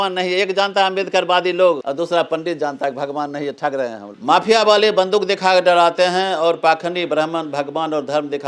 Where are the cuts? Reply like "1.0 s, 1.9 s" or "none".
1.8 s, 4.1 s